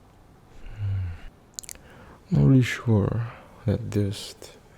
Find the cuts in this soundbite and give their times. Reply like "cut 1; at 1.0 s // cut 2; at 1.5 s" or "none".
cut 1; at 1.4 s